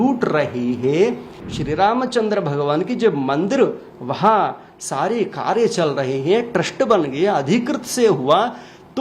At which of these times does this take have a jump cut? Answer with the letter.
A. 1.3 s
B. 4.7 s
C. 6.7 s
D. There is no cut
A